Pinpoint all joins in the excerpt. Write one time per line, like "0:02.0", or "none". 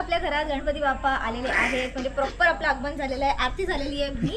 none